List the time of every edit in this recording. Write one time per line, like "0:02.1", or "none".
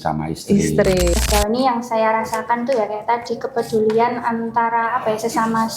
0:01.2